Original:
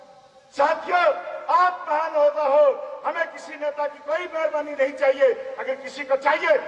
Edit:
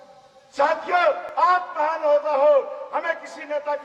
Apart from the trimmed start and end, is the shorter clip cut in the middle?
yes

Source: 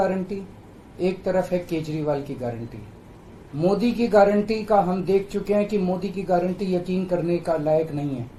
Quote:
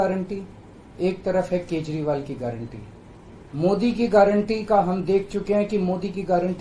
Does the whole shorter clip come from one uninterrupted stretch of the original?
yes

